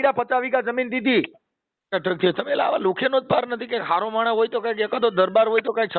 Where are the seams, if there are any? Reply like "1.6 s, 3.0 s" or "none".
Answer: 1.9 s